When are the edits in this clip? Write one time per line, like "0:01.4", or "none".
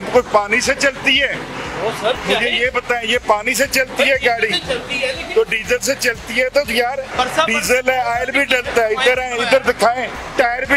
none